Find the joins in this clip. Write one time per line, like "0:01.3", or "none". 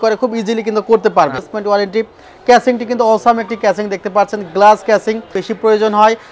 0:01.5
0:05.4